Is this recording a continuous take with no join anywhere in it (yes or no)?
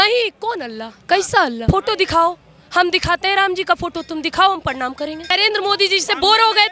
no